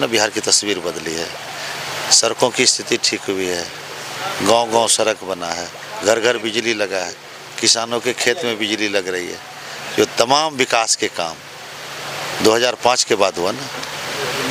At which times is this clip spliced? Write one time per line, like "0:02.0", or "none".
none